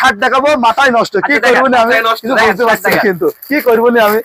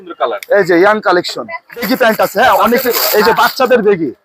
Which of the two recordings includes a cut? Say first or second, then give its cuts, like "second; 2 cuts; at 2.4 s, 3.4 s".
second; 1 cut; at 1.9 s